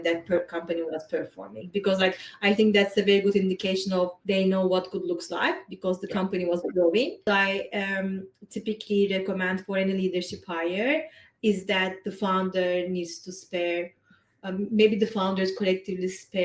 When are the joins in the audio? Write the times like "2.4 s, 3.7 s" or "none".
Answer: 4.2 s, 7.2 s